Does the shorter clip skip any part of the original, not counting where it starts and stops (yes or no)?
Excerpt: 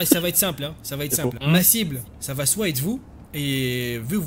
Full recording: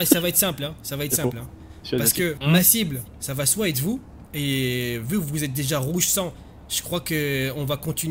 yes